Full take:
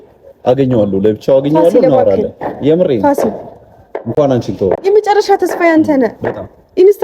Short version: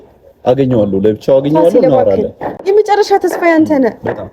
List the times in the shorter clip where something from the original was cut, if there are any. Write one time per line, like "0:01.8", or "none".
0:02.6